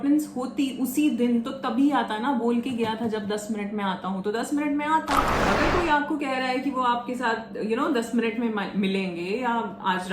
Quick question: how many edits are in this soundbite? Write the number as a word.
one